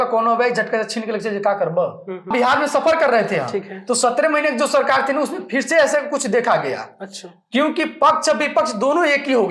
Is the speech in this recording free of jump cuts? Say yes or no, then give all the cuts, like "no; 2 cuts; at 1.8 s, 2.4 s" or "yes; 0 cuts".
no; 1 cut; at 2.3 s